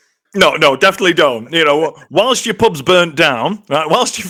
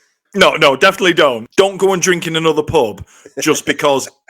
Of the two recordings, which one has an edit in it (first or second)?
second